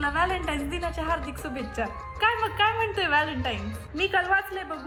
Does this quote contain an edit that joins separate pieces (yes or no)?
no